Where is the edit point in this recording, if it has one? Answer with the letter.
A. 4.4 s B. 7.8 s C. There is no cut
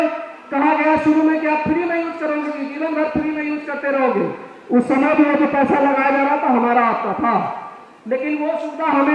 C